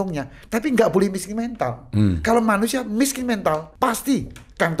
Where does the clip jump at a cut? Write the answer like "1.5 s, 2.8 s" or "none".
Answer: 3.7 s